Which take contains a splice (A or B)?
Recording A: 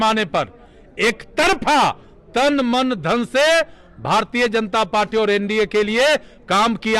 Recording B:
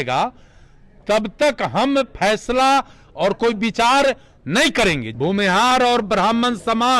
B